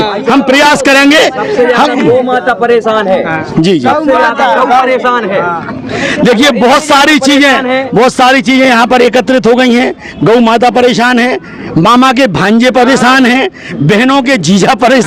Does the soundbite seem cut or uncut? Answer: uncut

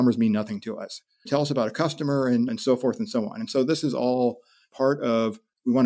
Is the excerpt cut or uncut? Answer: cut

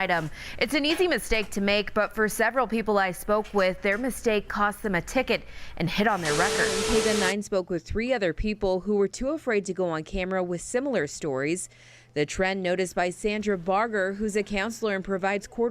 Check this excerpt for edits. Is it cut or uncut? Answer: cut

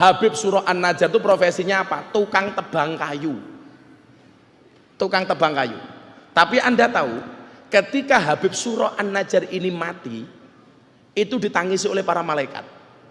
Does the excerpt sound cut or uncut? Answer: uncut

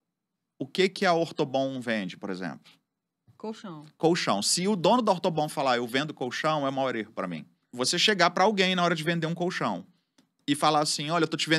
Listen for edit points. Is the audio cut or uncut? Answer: uncut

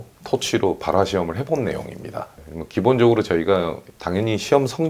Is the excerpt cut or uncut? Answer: uncut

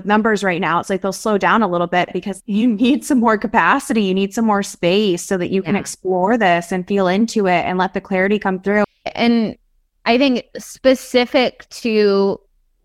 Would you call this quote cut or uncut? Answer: cut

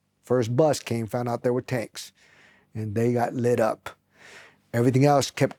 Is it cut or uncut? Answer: uncut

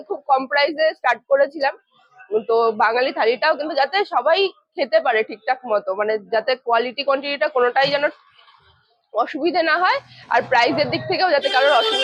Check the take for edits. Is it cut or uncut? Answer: uncut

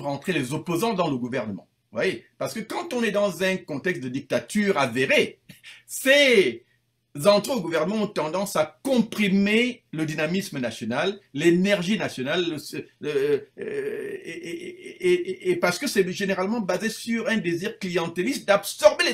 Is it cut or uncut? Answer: uncut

